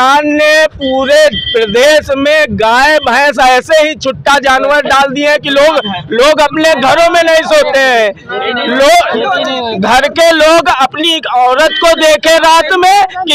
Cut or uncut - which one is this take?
uncut